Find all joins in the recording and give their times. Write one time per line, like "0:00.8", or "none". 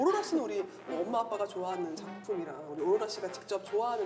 none